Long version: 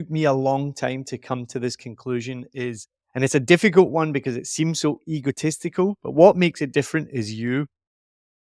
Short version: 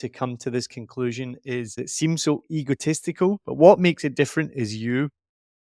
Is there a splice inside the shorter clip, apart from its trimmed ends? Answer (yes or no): yes